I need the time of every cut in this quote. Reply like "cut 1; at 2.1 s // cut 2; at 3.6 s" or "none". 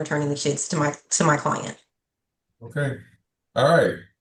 none